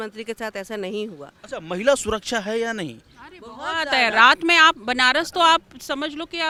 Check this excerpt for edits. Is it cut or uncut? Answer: uncut